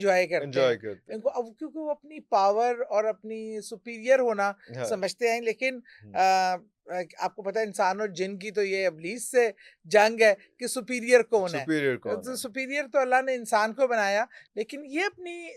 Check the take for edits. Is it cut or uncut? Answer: uncut